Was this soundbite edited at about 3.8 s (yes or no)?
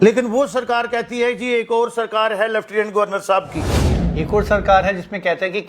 yes